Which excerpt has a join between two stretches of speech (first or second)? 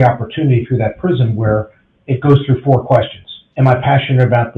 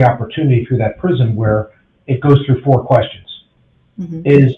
first